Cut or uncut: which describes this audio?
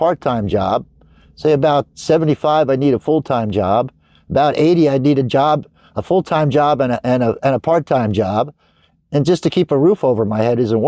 uncut